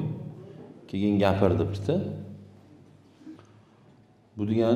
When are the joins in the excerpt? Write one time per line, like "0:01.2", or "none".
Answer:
0:03.4